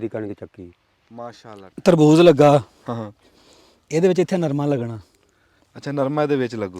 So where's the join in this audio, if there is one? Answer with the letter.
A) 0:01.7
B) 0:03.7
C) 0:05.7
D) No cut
A